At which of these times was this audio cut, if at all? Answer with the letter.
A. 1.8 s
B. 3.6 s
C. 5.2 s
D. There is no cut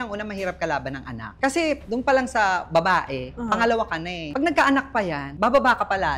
A